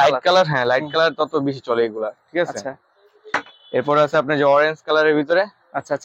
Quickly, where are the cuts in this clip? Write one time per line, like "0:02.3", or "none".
none